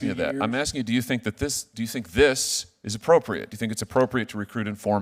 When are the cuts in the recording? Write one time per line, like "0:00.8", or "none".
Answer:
none